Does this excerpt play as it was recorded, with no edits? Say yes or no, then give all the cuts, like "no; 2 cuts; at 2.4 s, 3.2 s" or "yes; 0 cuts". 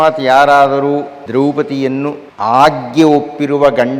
no; 2 cuts; at 1.2 s, 2.3 s